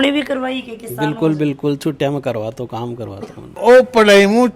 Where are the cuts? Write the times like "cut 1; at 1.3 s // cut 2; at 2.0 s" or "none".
cut 1; at 3.4 s